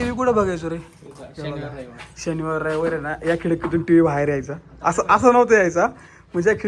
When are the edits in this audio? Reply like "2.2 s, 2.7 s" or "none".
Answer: none